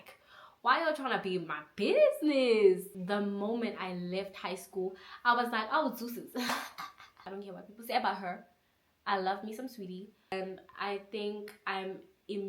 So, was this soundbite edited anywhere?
yes; 3 cuts; at 2.9 s, 7.2 s, 10.3 s

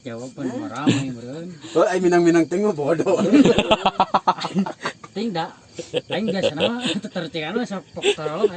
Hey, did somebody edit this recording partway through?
no; 0 cuts

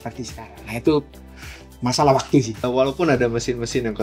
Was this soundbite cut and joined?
yes; 1 cut; at 2.5 s

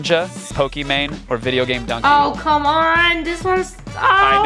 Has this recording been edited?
no; 0 cuts

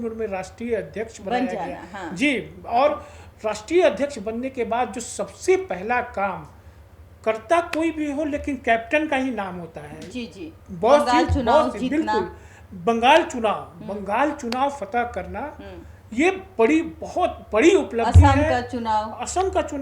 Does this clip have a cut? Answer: no; 0 cuts

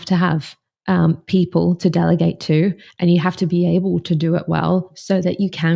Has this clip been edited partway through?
no; 0 cuts

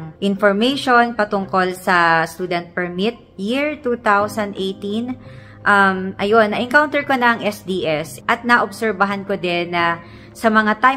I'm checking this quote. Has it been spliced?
no; 0 cuts

